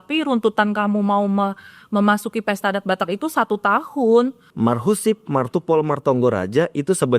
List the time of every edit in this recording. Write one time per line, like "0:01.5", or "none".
0:04.4